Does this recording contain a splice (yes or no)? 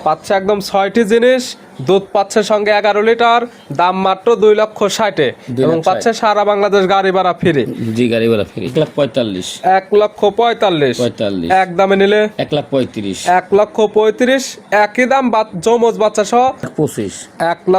yes